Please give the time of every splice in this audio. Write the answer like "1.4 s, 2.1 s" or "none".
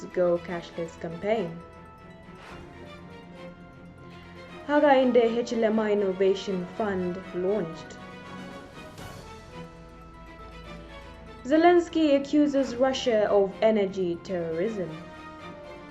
1.8 s, 4.6 s, 7.8 s, 9.2 s, 11.4 s, 15.0 s